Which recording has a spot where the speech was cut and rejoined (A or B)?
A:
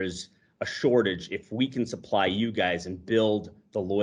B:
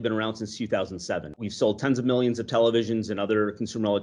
B